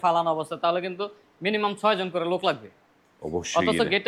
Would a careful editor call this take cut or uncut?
uncut